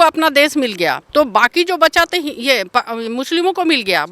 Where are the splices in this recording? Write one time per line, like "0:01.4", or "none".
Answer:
0:01.0